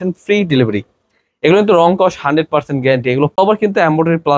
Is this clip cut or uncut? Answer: cut